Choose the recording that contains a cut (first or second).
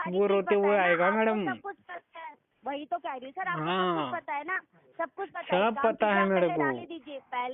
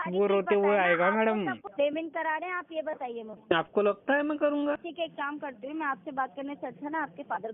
second